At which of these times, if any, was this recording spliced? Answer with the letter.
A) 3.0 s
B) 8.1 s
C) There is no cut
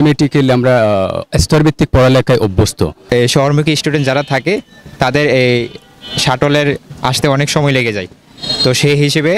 A